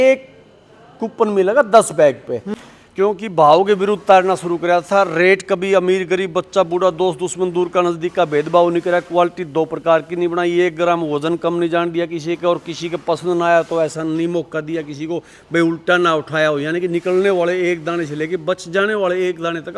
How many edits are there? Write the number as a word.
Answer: one